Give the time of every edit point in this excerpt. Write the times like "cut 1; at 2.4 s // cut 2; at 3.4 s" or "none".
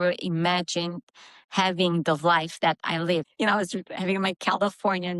cut 1; at 3.3 s